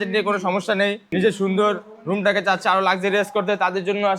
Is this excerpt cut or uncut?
cut